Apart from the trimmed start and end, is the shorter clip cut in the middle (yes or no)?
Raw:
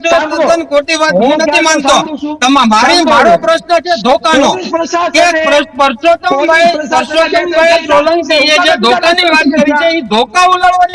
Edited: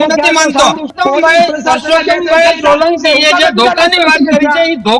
yes